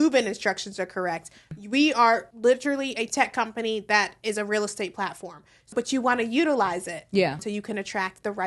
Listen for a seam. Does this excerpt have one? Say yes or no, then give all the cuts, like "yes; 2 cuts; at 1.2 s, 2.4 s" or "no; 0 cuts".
yes; 4 cuts; at 1.5 s, 2.3 s, 5.7 s, 7.4 s